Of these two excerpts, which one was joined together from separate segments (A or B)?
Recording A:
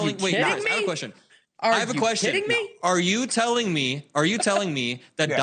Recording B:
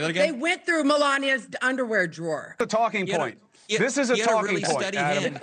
B